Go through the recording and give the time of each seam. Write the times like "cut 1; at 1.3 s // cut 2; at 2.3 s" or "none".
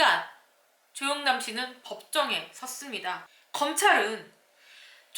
cut 1; at 3.3 s